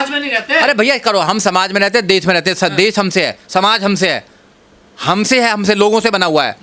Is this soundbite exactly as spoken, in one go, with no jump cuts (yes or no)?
yes